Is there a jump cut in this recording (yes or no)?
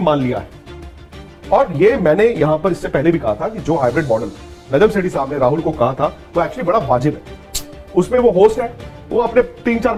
no